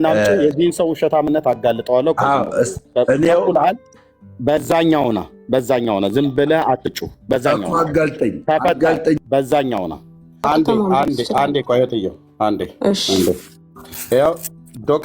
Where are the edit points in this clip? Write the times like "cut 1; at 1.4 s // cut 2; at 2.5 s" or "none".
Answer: cut 1; at 10.4 s